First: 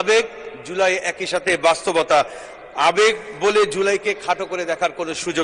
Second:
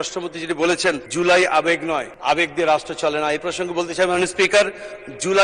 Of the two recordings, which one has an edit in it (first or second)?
second